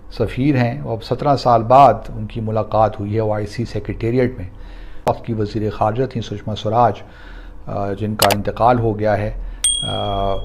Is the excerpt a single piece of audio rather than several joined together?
no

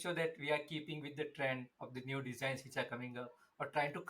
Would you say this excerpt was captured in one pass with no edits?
yes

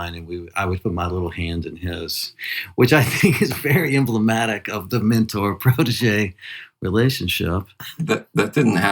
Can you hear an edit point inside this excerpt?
yes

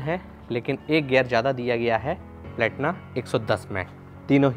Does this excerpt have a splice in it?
no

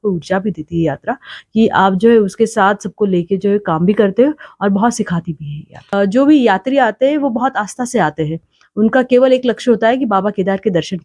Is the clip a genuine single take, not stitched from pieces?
no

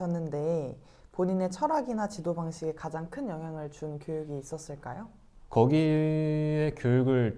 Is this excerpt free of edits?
no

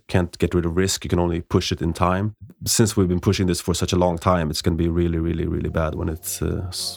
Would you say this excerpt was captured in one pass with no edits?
no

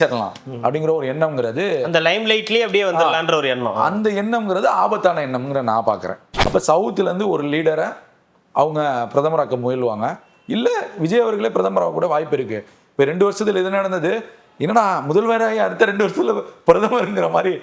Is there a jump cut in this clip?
yes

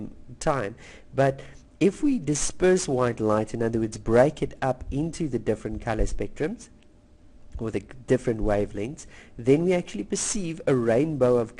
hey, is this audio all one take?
no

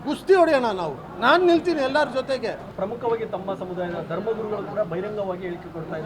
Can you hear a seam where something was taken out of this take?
yes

